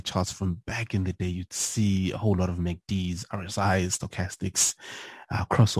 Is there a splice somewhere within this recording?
no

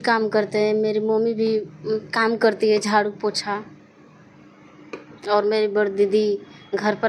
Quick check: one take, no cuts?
yes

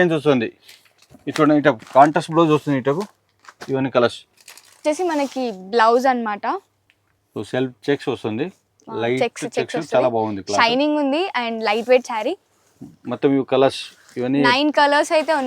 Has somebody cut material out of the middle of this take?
yes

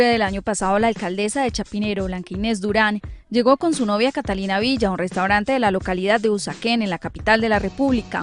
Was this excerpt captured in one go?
no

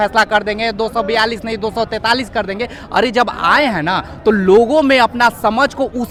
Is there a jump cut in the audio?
no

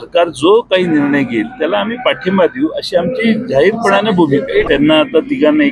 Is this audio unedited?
no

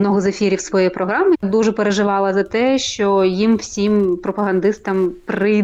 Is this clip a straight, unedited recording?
no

